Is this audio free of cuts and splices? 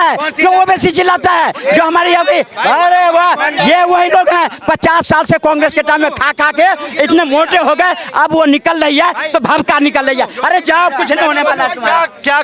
yes; 0 cuts

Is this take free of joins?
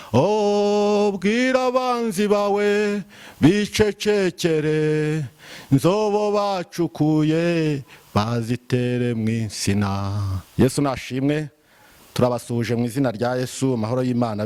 yes; 0 cuts

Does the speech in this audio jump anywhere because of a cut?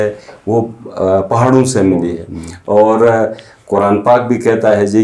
no; 0 cuts

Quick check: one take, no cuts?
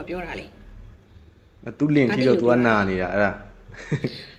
yes; 0 cuts

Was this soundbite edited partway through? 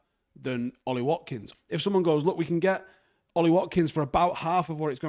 yes; 1 cut; at 1.4 s

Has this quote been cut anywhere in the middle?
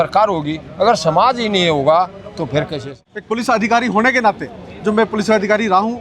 yes; 1 cut; at 2.9 s

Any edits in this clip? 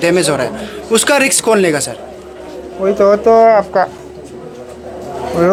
no; 0 cuts

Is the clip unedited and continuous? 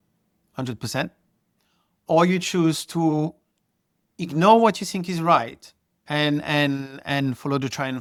yes; 0 cuts

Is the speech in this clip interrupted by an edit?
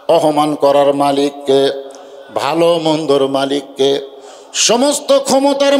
no; 0 cuts

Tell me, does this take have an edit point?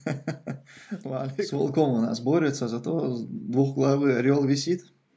yes; 1 cut; at 1.2 s

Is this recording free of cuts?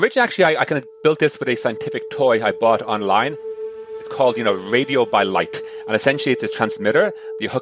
no; 1 cut; at 3.8 s

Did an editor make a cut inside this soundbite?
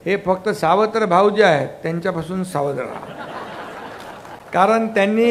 no; 0 cuts

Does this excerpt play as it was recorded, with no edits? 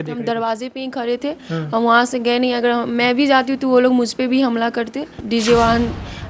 no; 1 cut; at 5.1 s

